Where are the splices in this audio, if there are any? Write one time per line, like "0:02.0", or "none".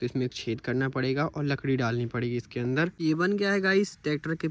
0:03.0